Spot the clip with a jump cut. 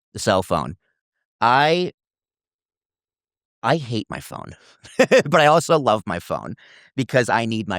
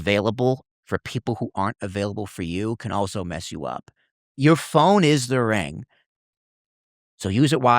second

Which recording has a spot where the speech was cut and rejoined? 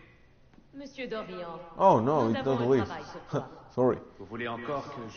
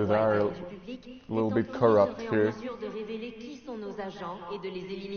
first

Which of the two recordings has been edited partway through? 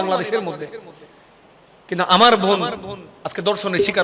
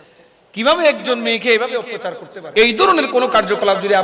second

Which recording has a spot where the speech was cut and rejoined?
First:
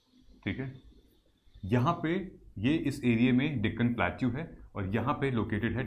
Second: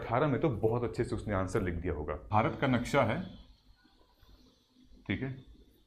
second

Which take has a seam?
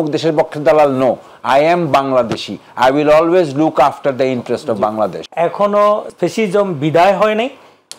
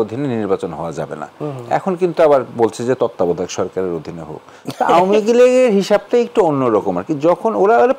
first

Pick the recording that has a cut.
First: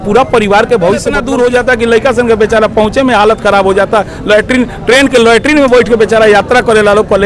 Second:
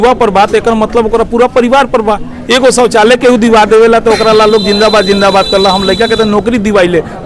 first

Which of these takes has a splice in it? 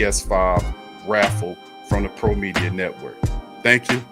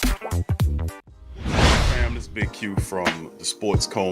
second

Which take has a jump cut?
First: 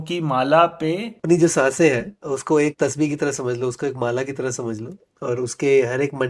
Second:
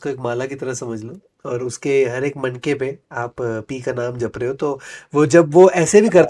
first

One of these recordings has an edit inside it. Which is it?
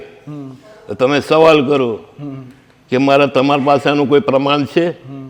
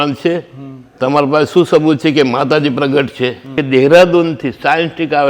second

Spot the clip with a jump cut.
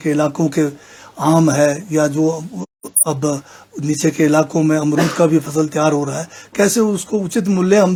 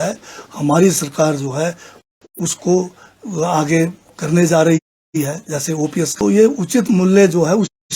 second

